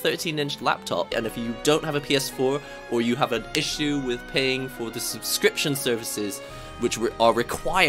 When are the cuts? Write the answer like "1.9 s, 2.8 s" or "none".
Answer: 1.1 s

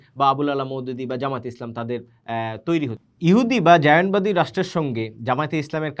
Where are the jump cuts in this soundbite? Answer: 3.0 s

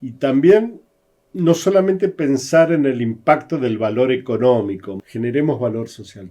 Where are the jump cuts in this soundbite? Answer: 4.9 s

